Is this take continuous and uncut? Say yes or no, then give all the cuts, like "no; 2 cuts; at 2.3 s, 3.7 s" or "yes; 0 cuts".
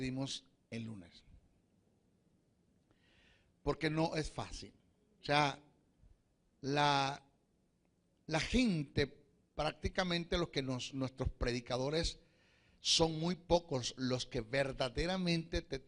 no; 1 cut; at 4.6 s